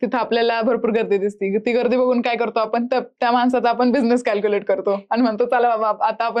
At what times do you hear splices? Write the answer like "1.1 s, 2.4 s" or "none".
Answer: none